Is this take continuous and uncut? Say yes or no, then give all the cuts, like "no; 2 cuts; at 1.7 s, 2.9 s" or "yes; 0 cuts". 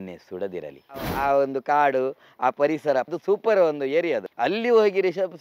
no; 3 cuts; at 1.1 s, 3.1 s, 4.3 s